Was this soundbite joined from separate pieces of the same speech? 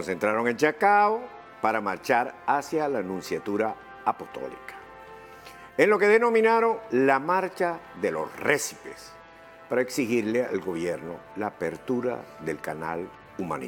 no; 0 cuts

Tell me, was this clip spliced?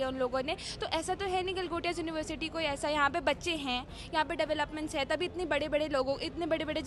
no; 0 cuts

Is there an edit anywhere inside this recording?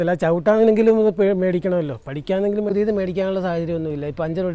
yes; 1 cut; at 2.7 s

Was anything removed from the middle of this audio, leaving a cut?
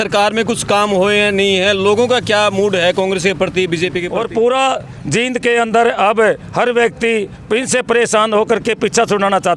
yes; 1 cut; at 4.1 s

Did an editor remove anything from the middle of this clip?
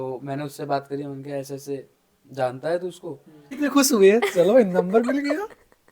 yes; 1 cut; at 3.5 s

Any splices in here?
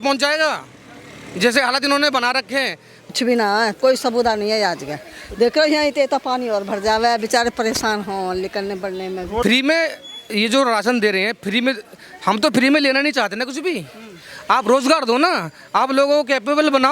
yes; 2 cuts; at 3.1 s, 9.4 s

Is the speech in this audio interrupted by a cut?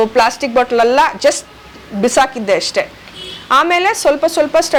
no; 0 cuts

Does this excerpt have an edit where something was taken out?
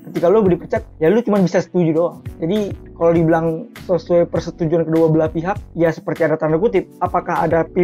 no; 0 cuts

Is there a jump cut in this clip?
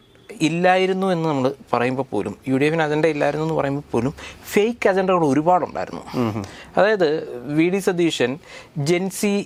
no; 0 cuts

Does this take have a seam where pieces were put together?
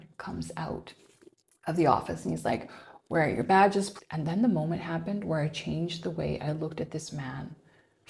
no; 0 cuts

